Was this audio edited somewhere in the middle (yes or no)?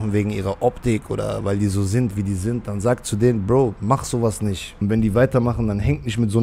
yes